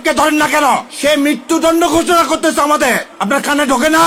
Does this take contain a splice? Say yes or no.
no